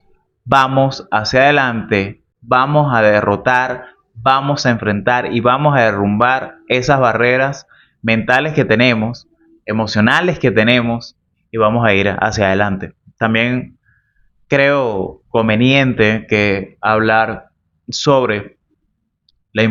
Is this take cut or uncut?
uncut